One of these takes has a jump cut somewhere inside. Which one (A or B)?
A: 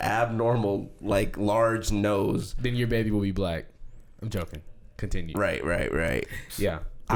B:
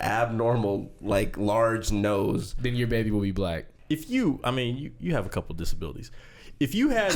B